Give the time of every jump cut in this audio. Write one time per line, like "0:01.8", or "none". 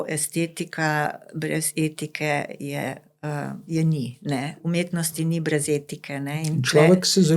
0:04.5